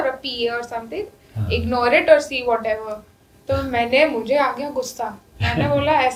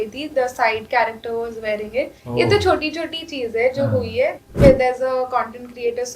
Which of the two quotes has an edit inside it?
second; 1 cut; at 4.4 s

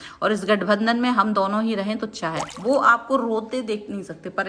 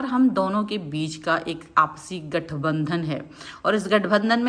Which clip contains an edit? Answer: first; 1 cut; at 2.5 s

